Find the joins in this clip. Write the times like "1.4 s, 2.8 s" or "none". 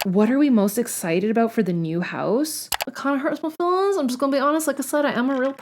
2.8 s